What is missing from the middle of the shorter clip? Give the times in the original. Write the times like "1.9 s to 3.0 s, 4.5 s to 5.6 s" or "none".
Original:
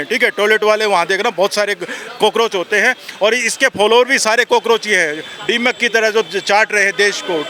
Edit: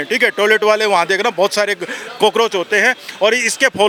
none